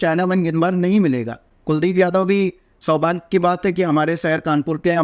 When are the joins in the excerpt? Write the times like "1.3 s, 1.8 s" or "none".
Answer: none